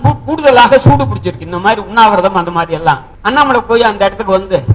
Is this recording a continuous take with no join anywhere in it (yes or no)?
no